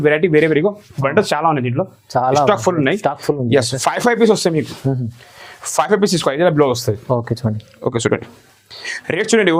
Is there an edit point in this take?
no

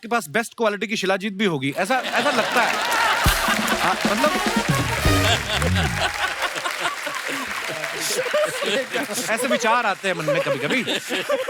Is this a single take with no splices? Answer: yes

